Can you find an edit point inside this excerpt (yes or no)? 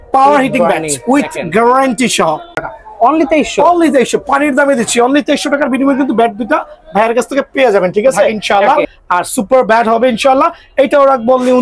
yes